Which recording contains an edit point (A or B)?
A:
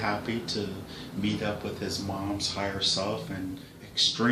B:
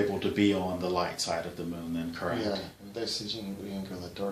A